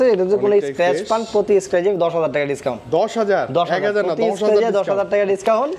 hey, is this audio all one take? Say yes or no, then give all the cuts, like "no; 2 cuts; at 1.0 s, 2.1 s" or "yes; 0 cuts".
yes; 0 cuts